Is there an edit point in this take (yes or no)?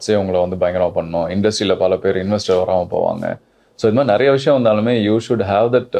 no